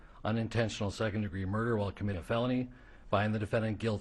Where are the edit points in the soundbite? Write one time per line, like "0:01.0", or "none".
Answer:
0:02.2